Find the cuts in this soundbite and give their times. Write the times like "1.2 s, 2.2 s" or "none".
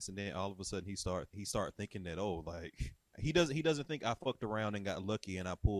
1.3 s, 3.2 s

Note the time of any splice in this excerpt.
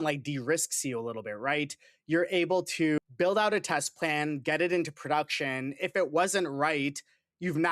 3.0 s

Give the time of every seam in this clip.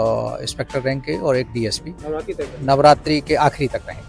none

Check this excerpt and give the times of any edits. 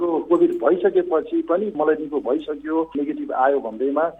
1.8 s, 2.9 s

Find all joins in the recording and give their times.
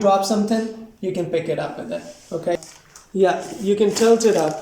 2.7 s

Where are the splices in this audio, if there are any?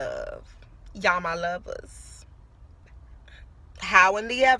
none

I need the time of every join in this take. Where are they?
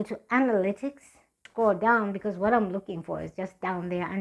1.5 s

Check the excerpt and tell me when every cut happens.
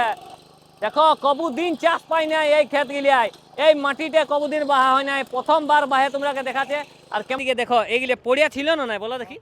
7.4 s

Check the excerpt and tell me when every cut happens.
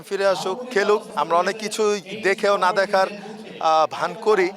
1.1 s

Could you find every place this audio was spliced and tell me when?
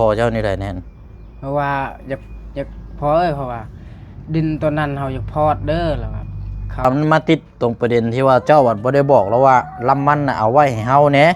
6.8 s

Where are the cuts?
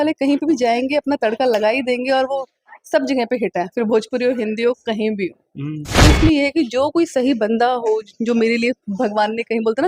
6.0 s

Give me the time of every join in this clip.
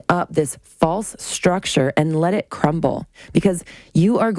3.1 s

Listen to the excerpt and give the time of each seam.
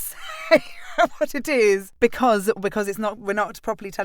1.9 s

